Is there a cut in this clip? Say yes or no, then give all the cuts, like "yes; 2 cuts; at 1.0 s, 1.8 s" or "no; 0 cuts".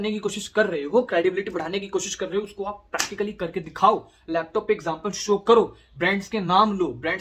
no; 0 cuts